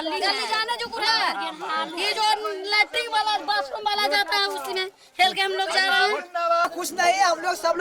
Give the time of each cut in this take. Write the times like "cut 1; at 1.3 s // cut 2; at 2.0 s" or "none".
cut 1; at 6.6 s